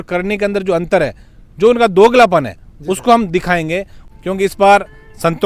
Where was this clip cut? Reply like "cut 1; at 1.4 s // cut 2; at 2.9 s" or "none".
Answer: cut 1; at 4.0 s